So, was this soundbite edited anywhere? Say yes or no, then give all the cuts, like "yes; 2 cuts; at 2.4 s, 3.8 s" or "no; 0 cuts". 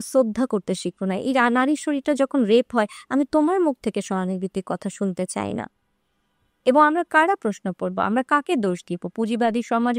no; 0 cuts